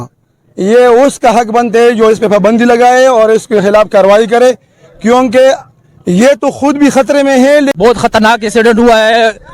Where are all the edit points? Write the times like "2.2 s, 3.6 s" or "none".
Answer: 7.7 s